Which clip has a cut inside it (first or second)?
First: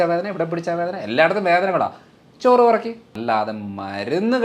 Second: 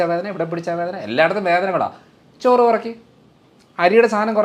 first